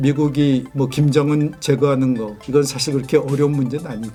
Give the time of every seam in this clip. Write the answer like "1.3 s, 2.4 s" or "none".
none